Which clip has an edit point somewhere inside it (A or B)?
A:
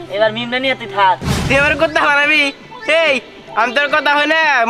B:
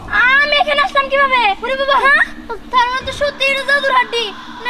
A